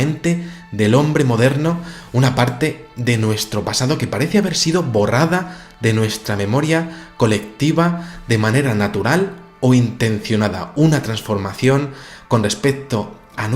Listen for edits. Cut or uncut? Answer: cut